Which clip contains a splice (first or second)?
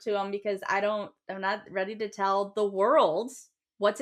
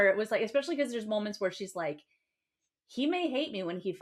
first